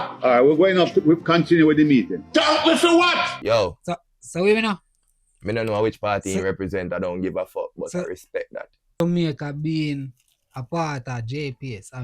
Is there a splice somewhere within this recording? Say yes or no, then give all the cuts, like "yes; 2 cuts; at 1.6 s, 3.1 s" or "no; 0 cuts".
yes; 2 cuts; at 3.3 s, 9.0 s